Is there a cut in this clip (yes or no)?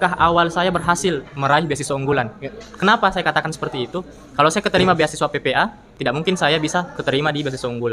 no